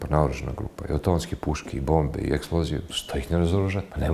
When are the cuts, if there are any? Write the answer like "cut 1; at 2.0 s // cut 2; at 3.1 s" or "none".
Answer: none